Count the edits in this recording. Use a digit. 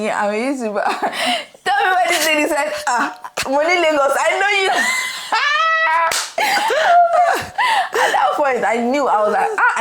0